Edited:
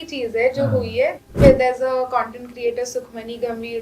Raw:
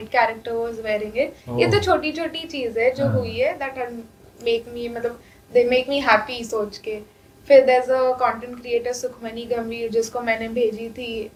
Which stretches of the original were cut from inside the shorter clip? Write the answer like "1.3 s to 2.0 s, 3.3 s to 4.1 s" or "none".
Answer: 3.7 s to 7.3 s